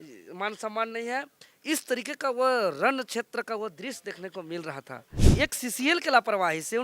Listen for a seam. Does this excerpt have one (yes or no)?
yes